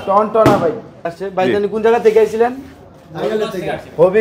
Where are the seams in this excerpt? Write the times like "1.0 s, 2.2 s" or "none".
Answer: 1.0 s